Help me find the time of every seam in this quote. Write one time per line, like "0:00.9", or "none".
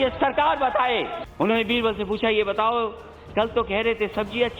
0:01.2